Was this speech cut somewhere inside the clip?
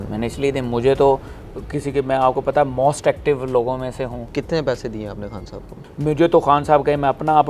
yes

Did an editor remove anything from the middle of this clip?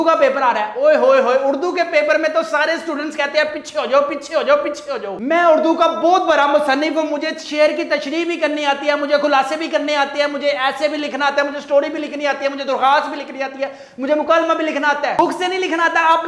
no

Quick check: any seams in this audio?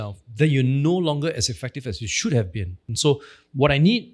yes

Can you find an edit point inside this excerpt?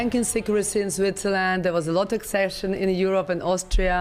no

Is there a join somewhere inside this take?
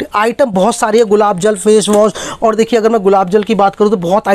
no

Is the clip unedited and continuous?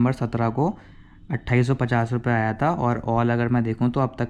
yes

